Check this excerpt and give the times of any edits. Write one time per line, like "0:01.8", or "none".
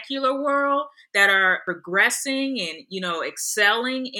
0:01.6